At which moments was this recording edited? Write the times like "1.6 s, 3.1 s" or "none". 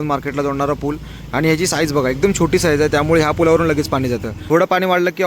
4.3 s